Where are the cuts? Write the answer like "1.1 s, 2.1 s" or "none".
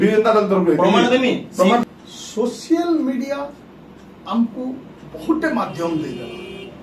1.8 s